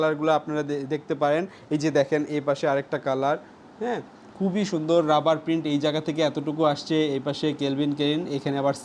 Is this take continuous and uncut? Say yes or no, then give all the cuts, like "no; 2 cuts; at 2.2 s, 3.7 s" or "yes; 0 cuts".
yes; 0 cuts